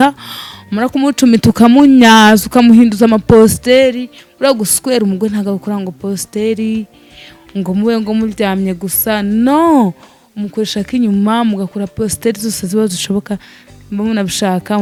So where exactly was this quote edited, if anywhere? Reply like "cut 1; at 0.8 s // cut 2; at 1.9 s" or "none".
none